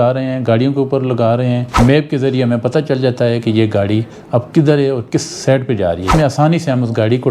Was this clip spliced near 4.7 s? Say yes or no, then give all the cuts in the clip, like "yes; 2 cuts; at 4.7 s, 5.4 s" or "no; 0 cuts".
no; 2 cuts; at 1.7 s, 6.1 s